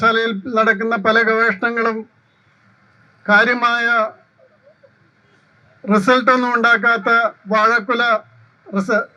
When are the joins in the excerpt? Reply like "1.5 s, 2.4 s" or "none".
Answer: none